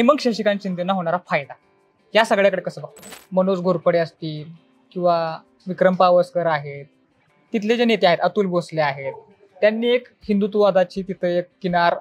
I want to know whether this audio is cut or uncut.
cut